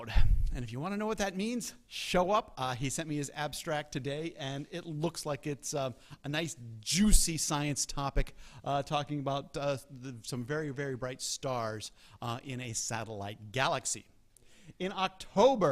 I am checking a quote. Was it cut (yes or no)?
yes